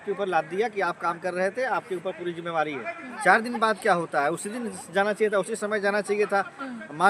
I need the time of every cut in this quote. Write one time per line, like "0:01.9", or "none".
0:03.1